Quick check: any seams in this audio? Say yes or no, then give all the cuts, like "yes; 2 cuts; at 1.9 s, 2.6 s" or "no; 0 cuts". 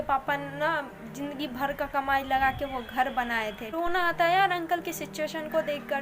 yes; 1 cut; at 3.6 s